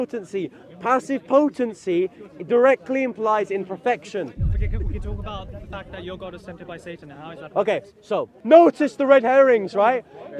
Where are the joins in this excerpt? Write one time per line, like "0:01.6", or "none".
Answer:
0:08.3

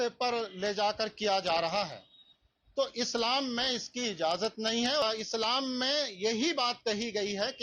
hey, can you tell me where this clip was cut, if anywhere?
0:05.0

